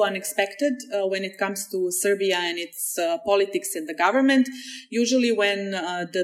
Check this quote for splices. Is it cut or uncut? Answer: uncut